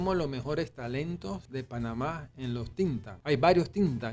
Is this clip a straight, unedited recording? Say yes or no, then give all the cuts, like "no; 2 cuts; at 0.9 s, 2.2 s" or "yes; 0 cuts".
no; 2 cuts; at 1.4 s, 3.1 s